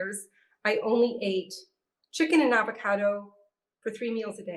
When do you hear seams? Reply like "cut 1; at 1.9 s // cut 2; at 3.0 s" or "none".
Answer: none